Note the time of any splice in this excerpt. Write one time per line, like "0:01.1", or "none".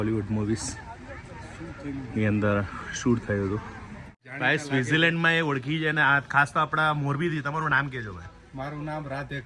0:04.2